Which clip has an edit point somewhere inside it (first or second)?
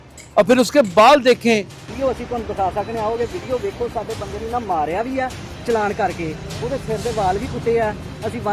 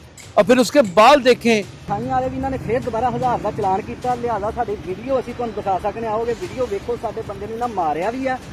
first